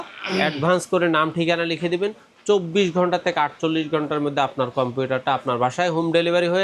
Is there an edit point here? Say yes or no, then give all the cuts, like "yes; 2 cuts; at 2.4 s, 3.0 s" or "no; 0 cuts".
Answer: no; 0 cuts